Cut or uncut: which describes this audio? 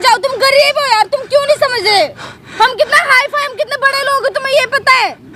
uncut